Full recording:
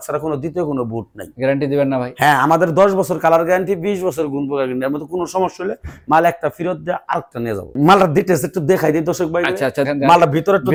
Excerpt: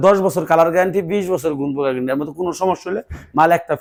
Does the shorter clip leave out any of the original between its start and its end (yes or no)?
no